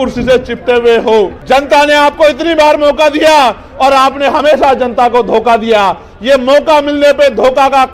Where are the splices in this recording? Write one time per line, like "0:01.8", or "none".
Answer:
0:01.4